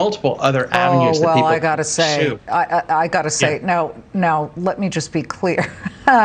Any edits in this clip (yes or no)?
no